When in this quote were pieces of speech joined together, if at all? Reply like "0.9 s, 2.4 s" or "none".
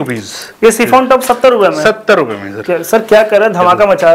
none